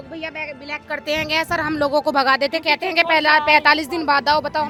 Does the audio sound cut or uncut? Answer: uncut